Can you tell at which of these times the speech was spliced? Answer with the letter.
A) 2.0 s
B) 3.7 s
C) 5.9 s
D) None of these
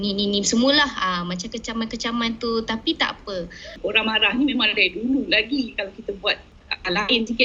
B